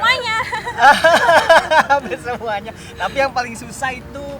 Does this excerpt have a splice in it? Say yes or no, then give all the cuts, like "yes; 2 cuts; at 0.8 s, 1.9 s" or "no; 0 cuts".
no; 0 cuts